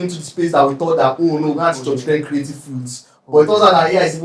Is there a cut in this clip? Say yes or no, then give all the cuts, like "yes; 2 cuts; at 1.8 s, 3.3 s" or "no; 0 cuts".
no; 0 cuts